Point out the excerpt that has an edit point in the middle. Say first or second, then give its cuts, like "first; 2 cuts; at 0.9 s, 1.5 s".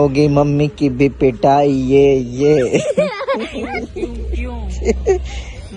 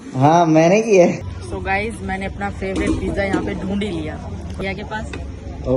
second; 2 cuts; at 1.2 s, 4.6 s